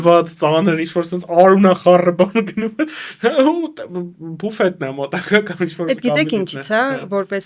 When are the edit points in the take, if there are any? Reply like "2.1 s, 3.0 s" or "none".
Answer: none